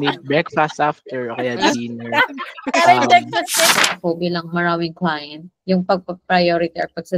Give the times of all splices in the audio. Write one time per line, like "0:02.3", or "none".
0:03.7